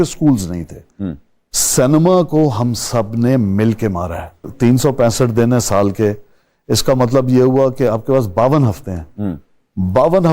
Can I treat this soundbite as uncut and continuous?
no; 1 cut; at 4.5 s

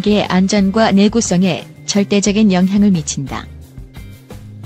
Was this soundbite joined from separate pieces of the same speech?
yes; 1 cut; at 3.5 s

